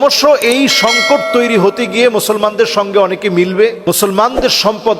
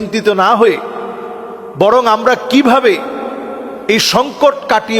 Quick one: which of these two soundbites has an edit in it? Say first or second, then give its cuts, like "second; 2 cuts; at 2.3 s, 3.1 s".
first; 1 cut; at 3.8 s